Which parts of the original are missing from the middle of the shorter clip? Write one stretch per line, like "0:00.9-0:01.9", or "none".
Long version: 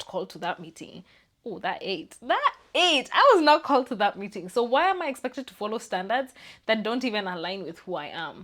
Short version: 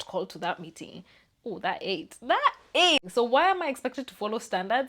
0:03.0-0:04.4